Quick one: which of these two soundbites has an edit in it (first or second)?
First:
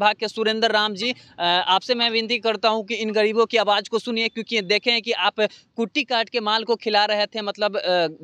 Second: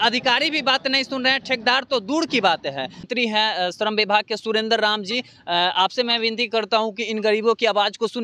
second